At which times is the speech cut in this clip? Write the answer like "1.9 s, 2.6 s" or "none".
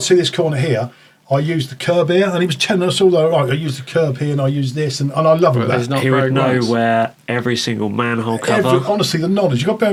none